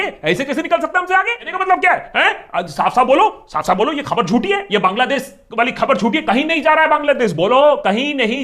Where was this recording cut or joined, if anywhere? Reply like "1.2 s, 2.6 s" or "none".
1.4 s